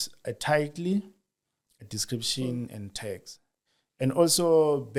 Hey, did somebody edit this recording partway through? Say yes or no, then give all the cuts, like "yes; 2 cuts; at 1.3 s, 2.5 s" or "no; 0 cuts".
no; 0 cuts